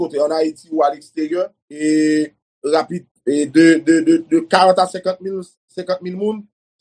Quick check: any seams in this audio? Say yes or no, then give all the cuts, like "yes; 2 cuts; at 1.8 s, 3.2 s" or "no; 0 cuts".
yes; 2 cuts; at 1.6 s, 3.0 s